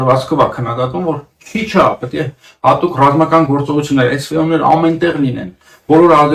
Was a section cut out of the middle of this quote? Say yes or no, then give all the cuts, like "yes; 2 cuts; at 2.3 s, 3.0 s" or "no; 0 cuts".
no; 0 cuts